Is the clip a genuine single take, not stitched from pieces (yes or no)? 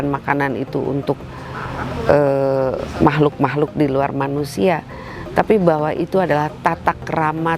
yes